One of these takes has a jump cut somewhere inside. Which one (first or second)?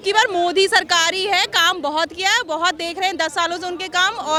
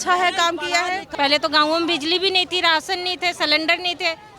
second